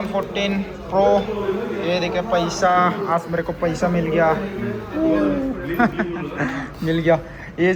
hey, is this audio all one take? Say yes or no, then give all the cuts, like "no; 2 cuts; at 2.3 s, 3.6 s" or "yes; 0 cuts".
yes; 0 cuts